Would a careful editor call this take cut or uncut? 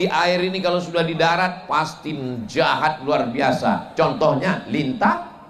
uncut